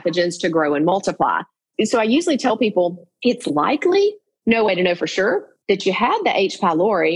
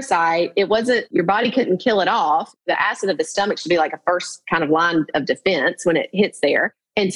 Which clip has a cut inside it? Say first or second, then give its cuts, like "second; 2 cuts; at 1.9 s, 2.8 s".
first; 1 cut; at 1.6 s